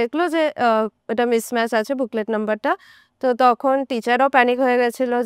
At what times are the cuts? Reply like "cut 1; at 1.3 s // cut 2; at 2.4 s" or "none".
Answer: none